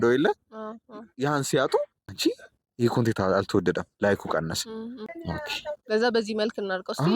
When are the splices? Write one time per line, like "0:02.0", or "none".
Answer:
0:02.0
0:05.1